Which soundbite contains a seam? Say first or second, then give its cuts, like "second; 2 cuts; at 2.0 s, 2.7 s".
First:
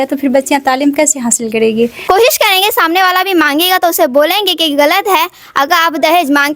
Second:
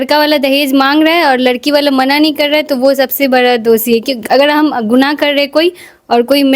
first; 1 cut; at 2.0 s